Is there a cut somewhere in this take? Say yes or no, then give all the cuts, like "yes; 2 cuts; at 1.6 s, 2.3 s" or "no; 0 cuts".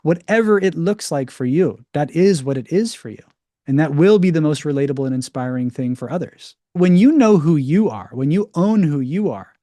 yes; 1 cut; at 6.8 s